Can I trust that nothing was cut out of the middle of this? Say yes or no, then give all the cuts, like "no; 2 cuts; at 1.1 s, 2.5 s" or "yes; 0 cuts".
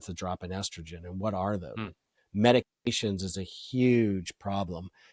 yes; 0 cuts